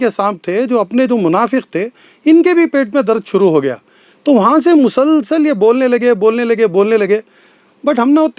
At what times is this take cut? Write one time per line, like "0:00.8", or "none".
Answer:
none